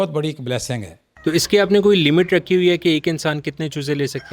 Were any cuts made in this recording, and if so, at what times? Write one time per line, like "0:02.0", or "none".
0:01.0